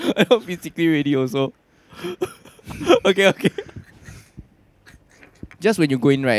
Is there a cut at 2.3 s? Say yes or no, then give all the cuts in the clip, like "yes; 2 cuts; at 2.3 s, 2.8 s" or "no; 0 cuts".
no; 1 cut; at 5.5 s